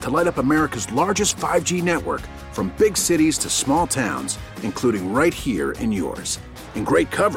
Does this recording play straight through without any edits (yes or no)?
yes